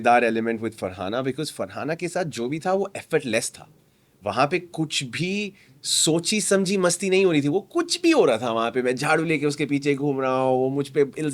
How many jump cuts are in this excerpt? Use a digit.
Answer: 0